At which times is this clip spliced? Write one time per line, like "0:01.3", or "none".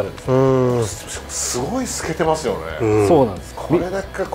0:03.4